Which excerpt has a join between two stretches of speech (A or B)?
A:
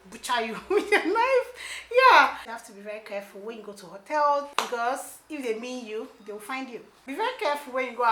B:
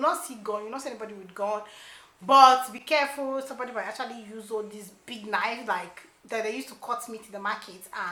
A